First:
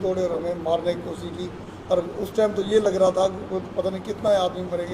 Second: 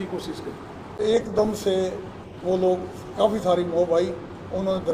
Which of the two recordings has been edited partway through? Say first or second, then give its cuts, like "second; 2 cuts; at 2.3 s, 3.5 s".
second; 1 cut; at 1.0 s